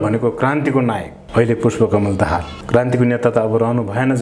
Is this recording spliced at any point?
yes; 1 cut; at 2.5 s

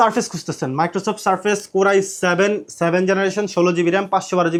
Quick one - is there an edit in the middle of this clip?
no; 0 cuts

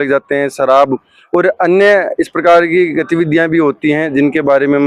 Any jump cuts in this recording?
no; 0 cuts

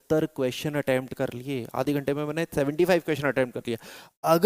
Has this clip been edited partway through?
no; 0 cuts

